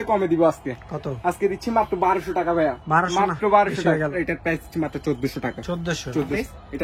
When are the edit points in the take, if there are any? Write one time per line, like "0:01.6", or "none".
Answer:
none